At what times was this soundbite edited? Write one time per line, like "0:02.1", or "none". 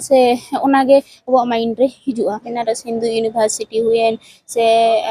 0:02.5